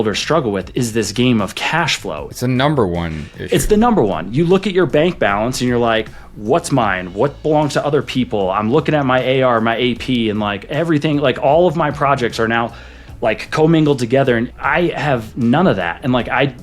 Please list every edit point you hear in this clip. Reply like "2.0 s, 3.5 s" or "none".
2.4 s, 14.5 s